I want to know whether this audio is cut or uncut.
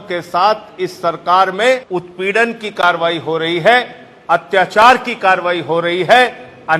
cut